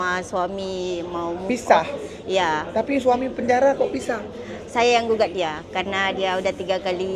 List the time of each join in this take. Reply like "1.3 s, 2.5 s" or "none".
none